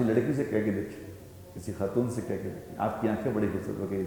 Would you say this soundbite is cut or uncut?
uncut